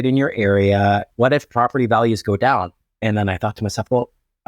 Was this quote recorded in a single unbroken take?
no; 2 cuts; at 1.1 s, 2.8 s

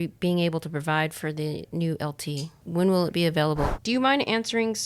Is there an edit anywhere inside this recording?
yes; 2 cuts; at 2.6 s, 3.7 s

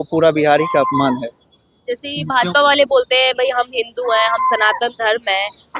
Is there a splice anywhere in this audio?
no; 0 cuts

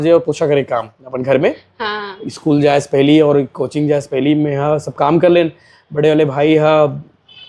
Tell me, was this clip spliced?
no; 0 cuts

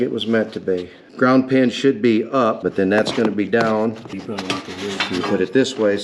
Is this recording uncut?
no; 3 cuts; at 1.0 s, 2.6 s, 4.2 s

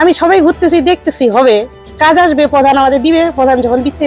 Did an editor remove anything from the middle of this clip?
yes; 1 cut; at 1.8 s

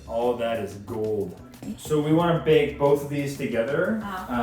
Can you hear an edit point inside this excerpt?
no; 0 cuts

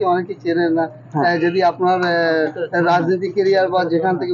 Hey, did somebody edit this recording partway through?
no; 0 cuts

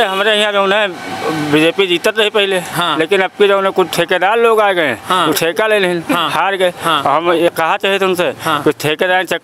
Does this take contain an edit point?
yes; 1 cut; at 7.5 s

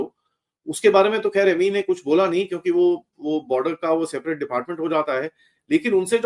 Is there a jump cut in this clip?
no; 0 cuts

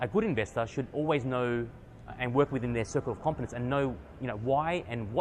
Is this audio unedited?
yes; 0 cuts

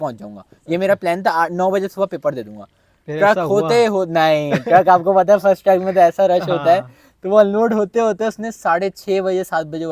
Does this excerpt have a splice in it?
no; 0 cuts

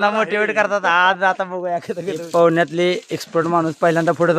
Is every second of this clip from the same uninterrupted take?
no; 1 cut; at 2.1 s

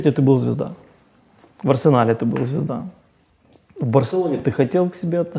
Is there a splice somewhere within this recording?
no; 0 cuts

